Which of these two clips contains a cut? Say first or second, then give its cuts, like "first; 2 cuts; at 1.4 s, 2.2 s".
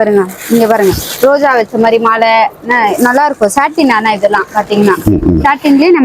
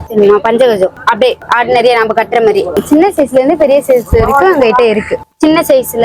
second; 2 cuts; at 2.8 s, 5.3 s